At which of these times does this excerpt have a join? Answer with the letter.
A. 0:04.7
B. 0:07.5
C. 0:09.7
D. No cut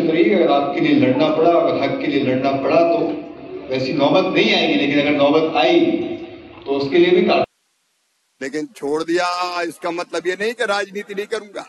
B